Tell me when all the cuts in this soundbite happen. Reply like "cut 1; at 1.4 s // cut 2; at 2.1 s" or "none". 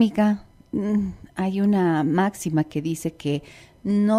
none